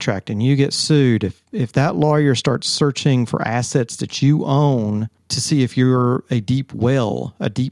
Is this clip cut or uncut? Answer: uncut